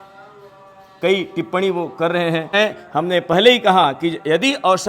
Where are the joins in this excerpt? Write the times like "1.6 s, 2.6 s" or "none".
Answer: 2.5 s